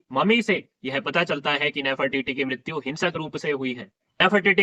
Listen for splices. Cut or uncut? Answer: uncut